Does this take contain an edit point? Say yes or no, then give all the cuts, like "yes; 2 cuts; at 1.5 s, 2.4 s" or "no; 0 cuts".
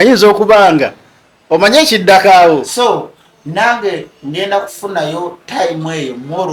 yes; 1 cut; at 2.7 s